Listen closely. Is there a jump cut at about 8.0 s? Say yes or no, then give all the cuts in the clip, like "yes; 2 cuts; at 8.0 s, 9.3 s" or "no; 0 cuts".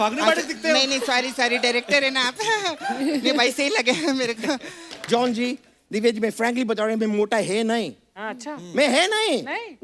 no; 1 cut; at 4.8 s